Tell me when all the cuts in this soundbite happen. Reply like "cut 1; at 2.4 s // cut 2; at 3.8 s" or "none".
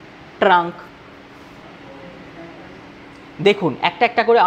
cut 1; at 1.6 s